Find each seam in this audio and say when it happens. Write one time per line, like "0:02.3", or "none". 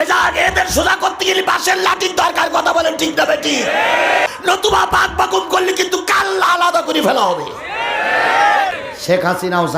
0:04.3
0:08.9